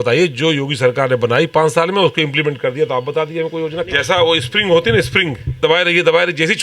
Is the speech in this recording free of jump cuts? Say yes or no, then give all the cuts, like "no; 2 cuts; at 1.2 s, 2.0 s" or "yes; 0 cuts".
no; 2 cuts; at 3.9 s, 5.6 s